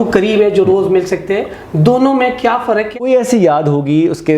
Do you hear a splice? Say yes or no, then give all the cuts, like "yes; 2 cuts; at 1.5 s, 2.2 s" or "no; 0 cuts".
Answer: yes; 1 cut; at 3.0 s